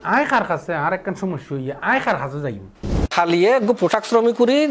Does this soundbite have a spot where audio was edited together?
yes; 1 cut; at 3.0 s

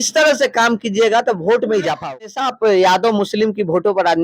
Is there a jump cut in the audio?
yes; 1 cut; at 2.4 s

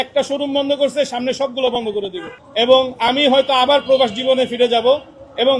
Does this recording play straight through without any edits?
yes; 0 cuts

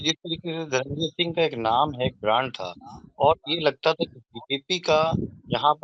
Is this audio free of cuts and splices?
yes; 0 cuts

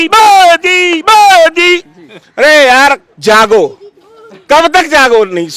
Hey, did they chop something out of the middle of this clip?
no; 0 cuts

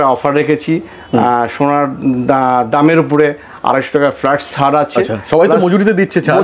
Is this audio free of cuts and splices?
yes; 0 cuts

